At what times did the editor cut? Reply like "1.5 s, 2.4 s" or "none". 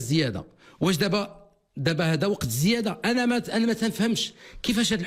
none